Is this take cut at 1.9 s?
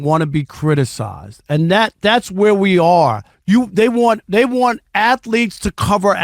no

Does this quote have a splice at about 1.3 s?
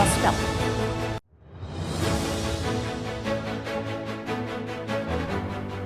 no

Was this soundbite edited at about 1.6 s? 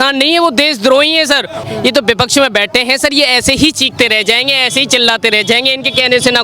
yes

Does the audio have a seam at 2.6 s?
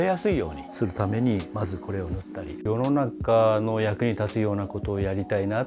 yes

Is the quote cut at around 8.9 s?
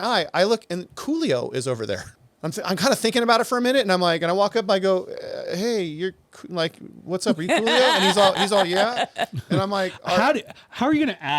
no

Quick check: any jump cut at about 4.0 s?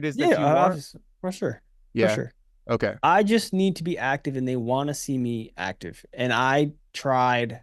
no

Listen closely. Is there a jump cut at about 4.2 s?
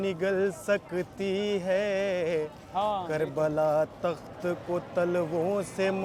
no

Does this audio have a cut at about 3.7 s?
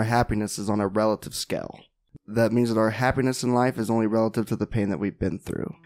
no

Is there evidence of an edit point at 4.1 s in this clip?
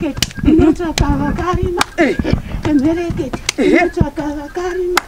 no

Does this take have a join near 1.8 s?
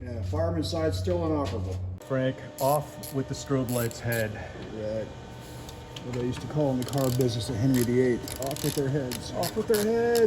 yes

